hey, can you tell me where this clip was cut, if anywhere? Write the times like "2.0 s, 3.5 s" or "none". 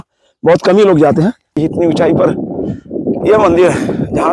1.6 s